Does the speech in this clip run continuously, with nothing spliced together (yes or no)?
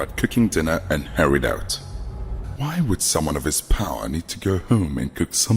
no